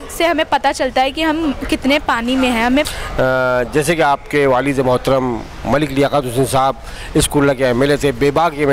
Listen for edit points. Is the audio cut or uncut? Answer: cut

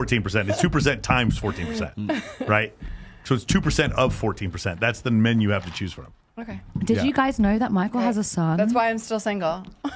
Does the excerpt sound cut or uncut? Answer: uncut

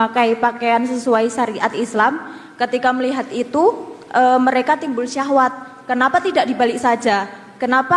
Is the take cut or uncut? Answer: uncut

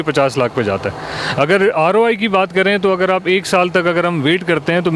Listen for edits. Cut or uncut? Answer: uncut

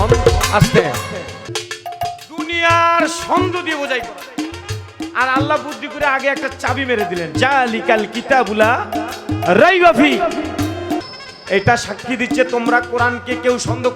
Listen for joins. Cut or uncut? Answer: cut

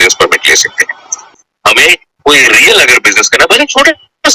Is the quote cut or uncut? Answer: cut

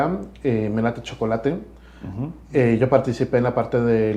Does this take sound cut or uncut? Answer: uncut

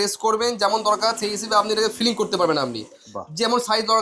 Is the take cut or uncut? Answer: uncut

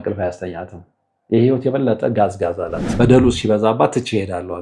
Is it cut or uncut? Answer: cut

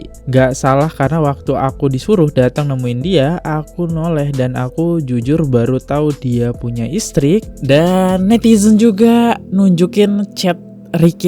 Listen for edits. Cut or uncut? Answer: cut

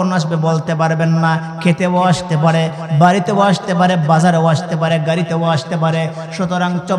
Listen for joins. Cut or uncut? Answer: uncut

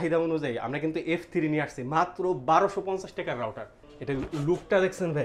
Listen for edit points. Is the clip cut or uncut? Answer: cut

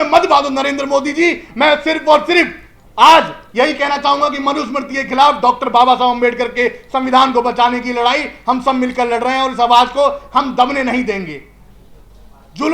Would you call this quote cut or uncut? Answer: uncut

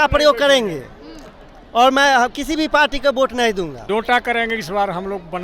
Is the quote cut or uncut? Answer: cut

